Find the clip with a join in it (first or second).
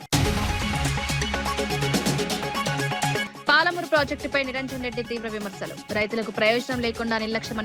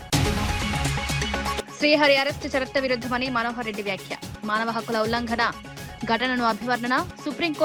first